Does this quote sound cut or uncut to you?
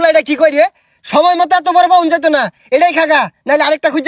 uncut